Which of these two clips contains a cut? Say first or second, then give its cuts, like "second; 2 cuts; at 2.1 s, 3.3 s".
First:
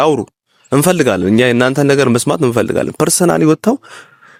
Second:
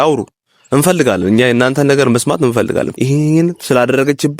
second; 1 cut; at 2.9 s